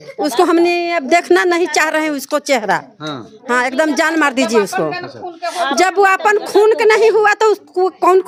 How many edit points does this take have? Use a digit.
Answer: 0